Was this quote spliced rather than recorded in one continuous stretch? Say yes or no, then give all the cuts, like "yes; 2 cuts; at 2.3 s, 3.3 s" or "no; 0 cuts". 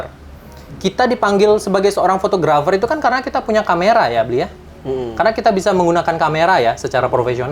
no; 0 cuts